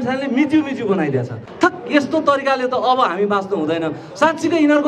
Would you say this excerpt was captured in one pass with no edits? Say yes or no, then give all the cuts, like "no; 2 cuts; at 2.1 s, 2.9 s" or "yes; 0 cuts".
no; 1 cut; at 1.4 s